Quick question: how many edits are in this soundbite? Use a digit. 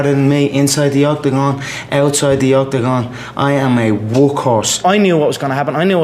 1